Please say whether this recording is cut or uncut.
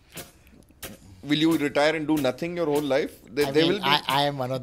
uncut